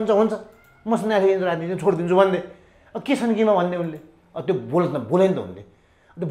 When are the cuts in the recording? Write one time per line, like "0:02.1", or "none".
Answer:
none